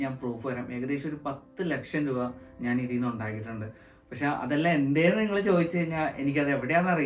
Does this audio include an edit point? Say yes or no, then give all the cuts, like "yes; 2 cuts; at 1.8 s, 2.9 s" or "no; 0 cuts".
no; 0 cuts